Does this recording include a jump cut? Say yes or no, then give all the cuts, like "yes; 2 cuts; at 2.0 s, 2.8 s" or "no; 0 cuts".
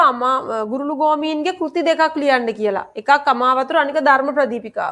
no; 0 cuts